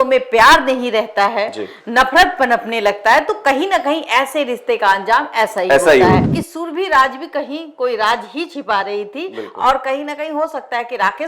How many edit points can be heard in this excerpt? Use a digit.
1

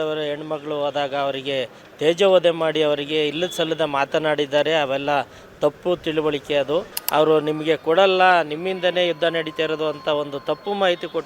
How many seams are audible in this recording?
1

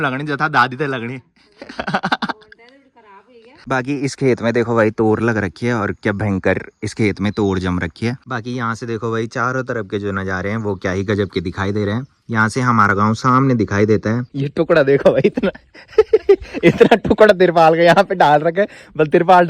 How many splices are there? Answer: 3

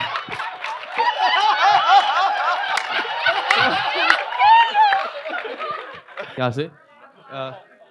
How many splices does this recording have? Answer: 1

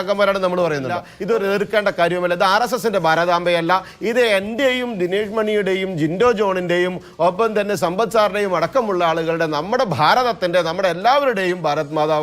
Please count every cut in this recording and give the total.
1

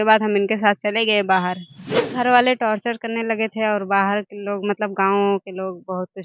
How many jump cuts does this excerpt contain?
1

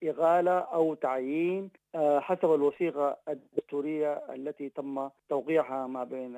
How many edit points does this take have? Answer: 2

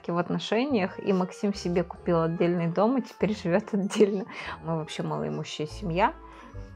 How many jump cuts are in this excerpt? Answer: 1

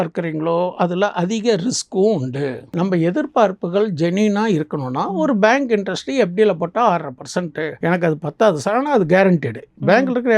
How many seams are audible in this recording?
2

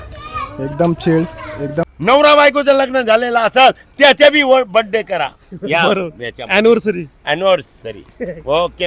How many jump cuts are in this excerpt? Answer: 1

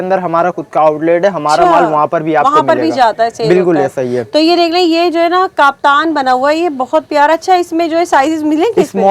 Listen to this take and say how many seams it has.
0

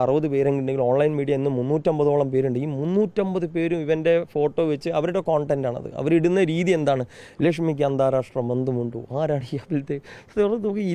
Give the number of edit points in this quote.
0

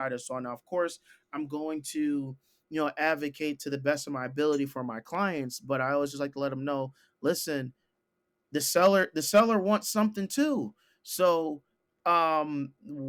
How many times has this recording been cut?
0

